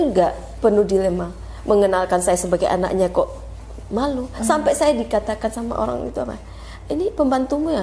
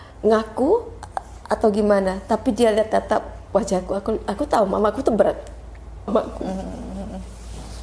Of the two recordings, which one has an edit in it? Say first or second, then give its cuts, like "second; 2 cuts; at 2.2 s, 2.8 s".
second; 1 cut; at 6.1 s